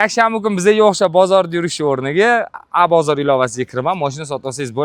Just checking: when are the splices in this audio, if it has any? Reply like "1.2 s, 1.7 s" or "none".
none